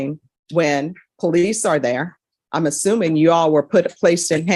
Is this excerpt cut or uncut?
uncut